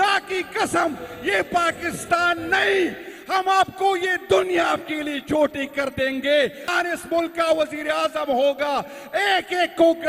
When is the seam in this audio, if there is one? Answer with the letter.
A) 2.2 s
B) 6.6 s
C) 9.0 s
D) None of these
B